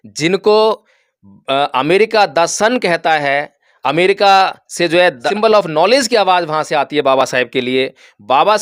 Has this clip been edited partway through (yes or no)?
yes